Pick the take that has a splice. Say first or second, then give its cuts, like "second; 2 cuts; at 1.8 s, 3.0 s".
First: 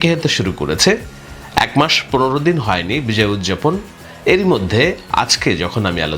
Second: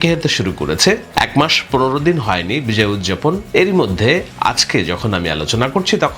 second; 2 cuts; at 1.1 s, 3.4 s